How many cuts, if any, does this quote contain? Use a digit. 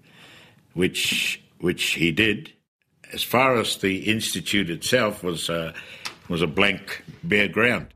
1